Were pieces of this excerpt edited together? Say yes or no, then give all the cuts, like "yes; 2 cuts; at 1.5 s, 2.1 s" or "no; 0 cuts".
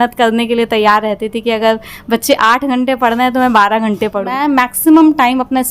yes; 1 cut; at 4.3 s